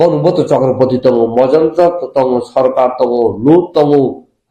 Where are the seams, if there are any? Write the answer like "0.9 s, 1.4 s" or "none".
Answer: none